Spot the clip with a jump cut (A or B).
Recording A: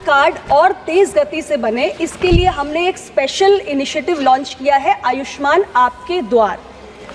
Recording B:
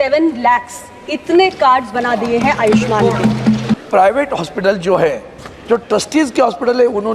B